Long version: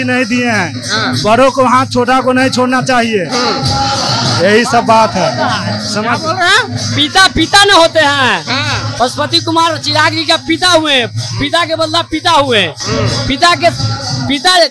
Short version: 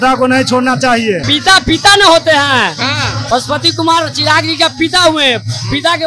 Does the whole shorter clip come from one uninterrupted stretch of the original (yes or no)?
no